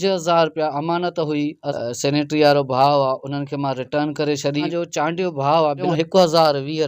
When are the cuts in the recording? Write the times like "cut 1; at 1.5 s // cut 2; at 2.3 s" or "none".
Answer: cut 1; at 1.7 s // cut 2; at 4.7 s // cut 3; at 5.8 s